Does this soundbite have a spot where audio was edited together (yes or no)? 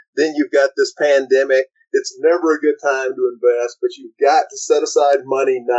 no